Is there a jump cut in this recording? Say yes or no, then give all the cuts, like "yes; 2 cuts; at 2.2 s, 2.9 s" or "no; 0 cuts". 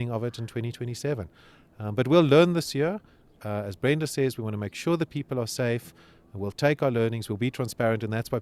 no; 0 cuts